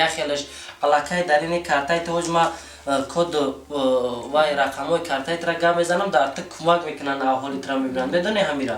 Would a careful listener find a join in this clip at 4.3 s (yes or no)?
no